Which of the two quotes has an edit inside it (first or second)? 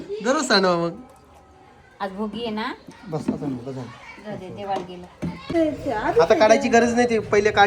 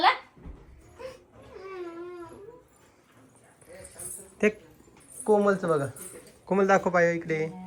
first